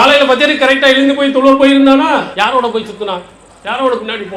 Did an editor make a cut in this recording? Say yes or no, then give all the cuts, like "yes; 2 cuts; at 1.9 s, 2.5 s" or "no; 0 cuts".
no; 0 cuts